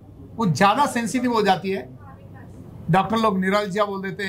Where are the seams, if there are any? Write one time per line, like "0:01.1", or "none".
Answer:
none